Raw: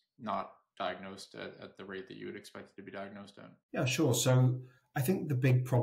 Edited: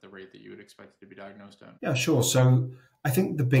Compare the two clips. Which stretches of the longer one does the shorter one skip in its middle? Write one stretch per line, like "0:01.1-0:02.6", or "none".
0:03.4-0:03.6

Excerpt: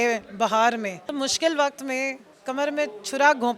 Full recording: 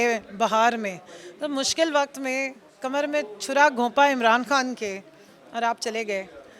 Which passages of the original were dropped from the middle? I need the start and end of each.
0:01.0-0:01.4

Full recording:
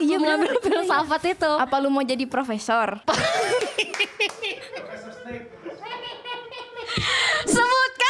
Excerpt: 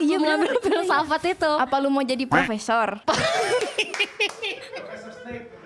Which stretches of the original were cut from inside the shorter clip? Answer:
none

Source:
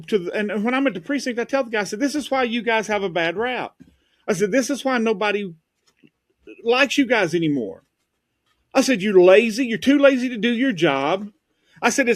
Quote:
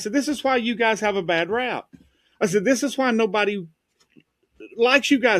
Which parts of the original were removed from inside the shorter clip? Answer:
none

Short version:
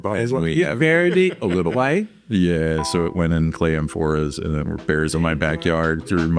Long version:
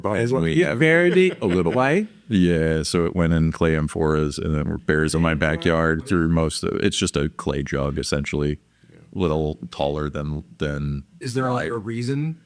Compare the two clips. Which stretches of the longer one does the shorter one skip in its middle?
none

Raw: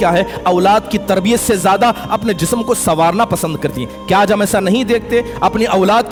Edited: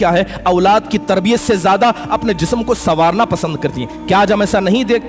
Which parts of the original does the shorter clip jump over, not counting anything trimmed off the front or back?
none

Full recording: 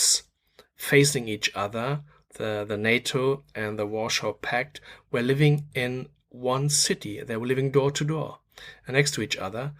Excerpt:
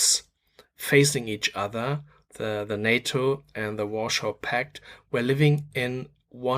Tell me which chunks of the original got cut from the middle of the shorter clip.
none

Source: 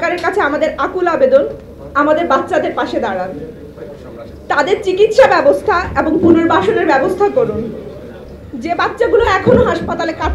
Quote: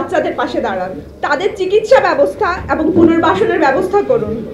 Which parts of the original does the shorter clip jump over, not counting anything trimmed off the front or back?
0:03.4-0:04.3

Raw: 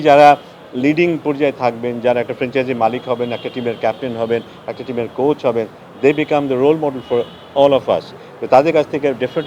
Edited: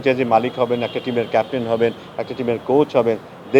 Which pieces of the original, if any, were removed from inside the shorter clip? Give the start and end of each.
none

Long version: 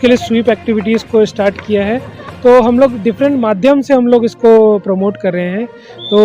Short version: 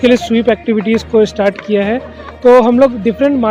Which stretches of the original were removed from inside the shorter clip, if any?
none

